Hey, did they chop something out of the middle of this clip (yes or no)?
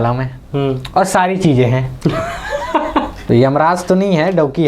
yes